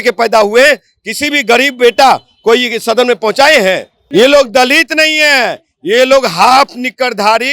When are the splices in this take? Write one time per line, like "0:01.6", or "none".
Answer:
0:03.9